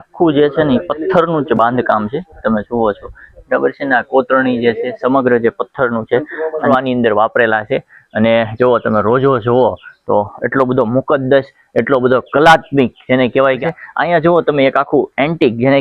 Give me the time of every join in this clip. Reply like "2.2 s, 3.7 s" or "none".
6.7 s, 13.6 s